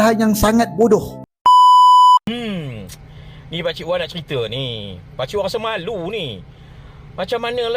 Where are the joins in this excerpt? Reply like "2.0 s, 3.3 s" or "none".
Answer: 1.1 s, 2.2 s